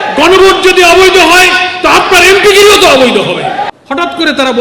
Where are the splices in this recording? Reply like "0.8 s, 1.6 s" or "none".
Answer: 3.6 s